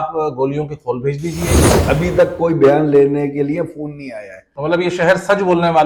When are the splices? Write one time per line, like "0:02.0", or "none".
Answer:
0:01.7